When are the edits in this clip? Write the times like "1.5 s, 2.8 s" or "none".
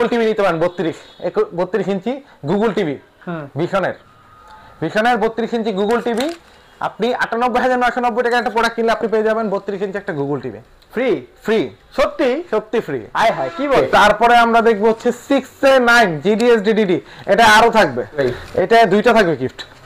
13.8 s, 18.2 s